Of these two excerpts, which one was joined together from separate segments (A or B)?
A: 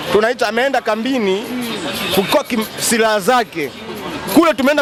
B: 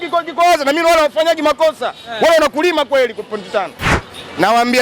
B